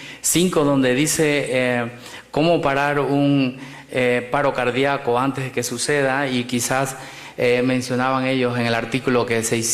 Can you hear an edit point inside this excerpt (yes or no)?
yes